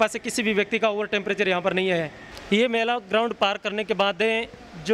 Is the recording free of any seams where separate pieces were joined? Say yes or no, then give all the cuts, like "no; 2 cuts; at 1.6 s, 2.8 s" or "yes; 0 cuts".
no; 1 cut; at 2.3 s